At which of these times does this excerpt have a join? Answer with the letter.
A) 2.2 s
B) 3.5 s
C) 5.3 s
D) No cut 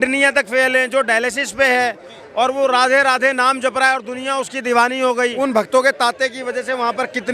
C